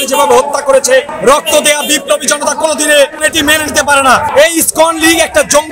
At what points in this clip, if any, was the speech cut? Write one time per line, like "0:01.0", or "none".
0:01.1
0:04.3